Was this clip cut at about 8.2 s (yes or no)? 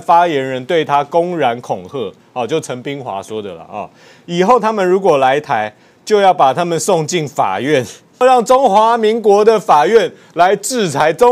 yes